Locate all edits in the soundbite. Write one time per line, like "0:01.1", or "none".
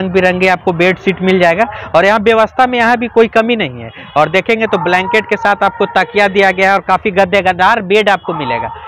none